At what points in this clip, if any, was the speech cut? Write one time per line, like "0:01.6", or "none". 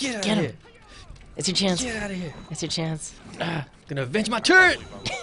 0:03.1